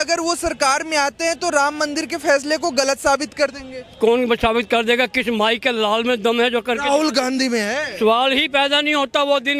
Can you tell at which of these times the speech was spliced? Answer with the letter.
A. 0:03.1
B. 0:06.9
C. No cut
C